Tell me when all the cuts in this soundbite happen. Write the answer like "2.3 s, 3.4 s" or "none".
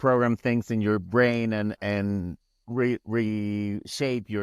none